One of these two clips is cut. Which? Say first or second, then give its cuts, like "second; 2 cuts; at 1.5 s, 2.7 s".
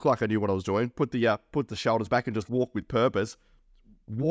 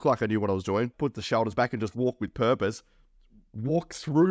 second; 1 cut; at 0.9 s